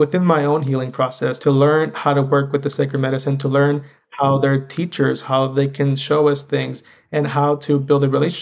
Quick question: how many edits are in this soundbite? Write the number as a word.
one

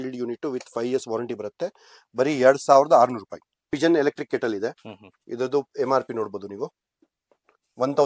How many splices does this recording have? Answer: one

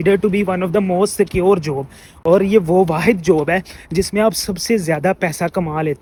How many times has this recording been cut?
zero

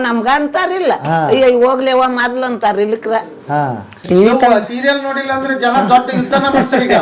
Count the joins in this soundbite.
one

